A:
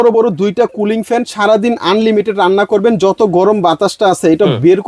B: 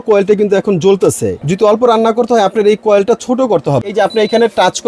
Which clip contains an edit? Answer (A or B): B